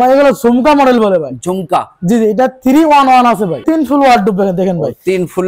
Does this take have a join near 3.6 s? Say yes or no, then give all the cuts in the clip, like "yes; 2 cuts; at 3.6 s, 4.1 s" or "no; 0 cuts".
yes; 1 cut; at 3.6 s